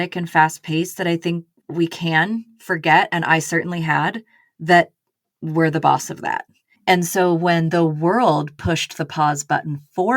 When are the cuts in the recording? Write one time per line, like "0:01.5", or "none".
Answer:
0:01.6